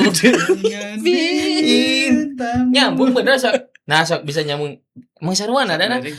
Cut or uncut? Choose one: uncut